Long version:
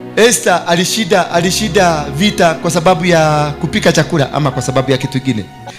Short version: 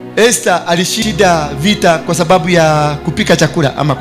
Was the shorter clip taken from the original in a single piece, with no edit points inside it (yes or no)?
no